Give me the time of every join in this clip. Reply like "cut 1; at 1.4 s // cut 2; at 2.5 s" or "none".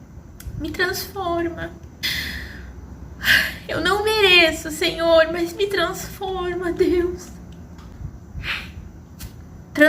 cut 1; at 2.0 s // cut 2; at 7.9 s